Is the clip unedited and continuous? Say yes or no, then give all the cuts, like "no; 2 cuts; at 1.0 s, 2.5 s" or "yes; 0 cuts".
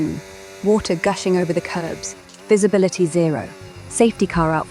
yes; 0 cuts